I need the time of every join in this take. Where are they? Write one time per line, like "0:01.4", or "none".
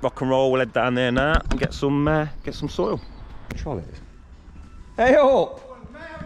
0:03.6